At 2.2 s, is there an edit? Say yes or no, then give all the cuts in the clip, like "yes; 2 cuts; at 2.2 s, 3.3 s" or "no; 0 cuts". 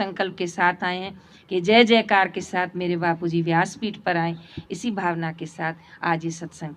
no; 0 cuts